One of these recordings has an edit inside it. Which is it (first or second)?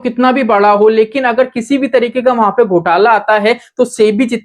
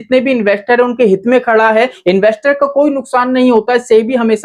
second